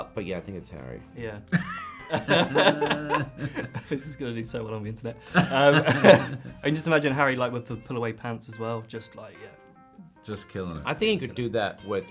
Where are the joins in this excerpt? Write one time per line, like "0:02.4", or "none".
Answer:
none